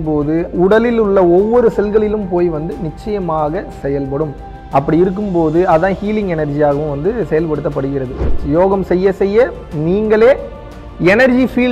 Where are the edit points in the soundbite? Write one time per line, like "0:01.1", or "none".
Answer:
0:08.4